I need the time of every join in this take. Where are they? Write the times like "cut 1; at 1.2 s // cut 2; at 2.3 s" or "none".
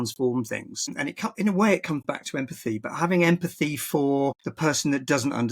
cut 1; at 1.0 s // cut 2; at 4.5 s